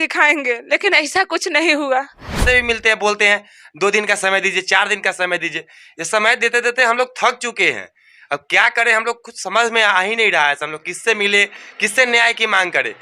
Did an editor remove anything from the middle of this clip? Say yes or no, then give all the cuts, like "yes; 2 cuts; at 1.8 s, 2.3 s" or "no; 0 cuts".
yes; 1 cut; at 2.4 s